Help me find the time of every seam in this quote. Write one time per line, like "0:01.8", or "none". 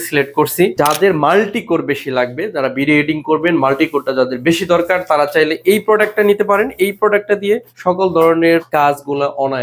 0:00.7
0:07.7
0:08.7